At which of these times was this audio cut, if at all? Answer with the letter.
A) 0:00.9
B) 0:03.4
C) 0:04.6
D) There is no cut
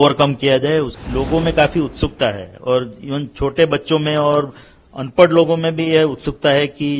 A